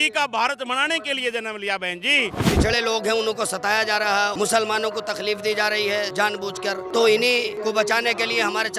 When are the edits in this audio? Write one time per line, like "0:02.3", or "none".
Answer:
0:02.4
0:04.3
0:06.3
0:07.5